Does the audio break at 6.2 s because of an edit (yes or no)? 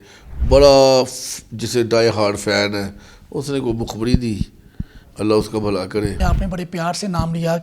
yes